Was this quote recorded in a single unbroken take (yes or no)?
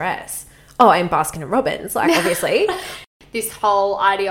no